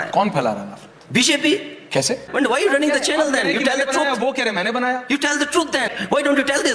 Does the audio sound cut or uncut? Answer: cut